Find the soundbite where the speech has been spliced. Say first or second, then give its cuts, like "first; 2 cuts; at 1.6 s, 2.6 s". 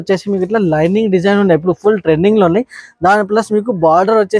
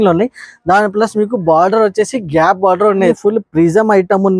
second; 1 cut; at 3.2 s